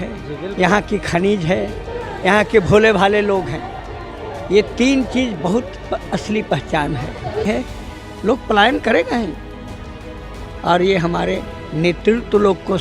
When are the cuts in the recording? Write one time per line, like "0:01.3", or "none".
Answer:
0:07.5